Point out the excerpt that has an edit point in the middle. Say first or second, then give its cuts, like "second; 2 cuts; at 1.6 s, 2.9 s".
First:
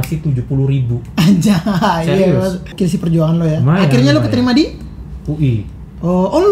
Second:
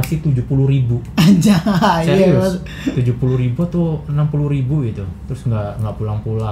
first; 1 cut; at 2.7 s